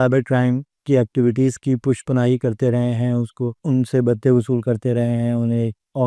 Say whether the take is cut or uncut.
uncut